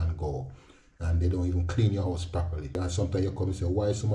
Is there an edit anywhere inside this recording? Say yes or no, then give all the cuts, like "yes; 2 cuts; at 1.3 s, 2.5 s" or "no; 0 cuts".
yes; 1 cut; at 2.8 s